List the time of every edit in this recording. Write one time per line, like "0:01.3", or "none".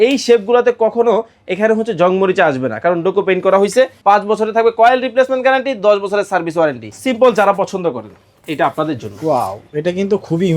0:04.0
0:06.9